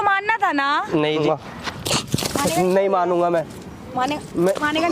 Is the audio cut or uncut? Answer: cut